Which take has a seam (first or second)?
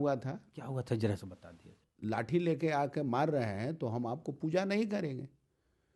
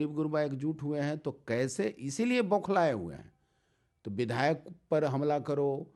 first